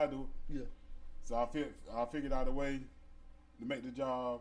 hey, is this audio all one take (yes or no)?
yes